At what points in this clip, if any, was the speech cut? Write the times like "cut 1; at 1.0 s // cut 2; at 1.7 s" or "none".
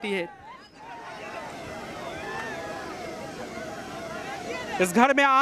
cut 1; at 1.1 s